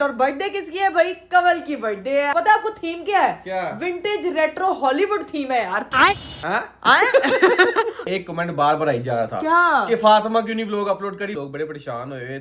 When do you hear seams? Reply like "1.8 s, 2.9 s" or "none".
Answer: 2.3 s, 8.0 s, 11.4 s